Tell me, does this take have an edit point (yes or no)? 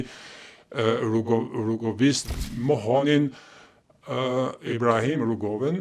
yes